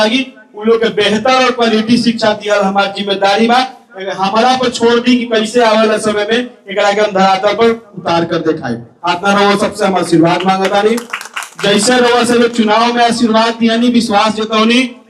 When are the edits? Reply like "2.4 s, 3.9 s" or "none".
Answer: none